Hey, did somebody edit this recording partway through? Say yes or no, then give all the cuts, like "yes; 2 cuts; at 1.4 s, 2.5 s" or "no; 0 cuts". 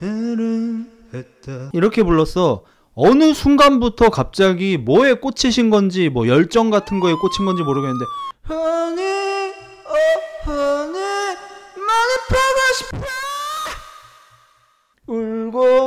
yes; 1 cut; at 1.7 s